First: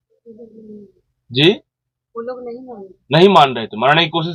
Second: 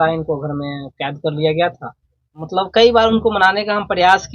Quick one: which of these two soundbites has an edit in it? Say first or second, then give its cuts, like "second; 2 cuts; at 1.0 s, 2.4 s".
second; 1 cut; at 2.4 s